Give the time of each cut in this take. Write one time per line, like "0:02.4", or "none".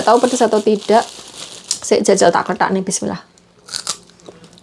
none